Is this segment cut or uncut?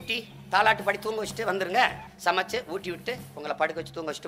cut